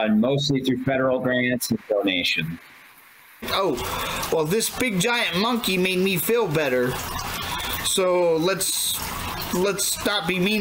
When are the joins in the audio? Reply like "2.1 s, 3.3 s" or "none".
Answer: 3.5 s